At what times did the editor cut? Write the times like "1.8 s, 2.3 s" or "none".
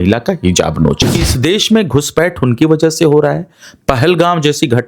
1.3 s